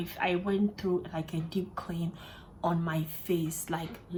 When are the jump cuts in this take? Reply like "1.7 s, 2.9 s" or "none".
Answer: none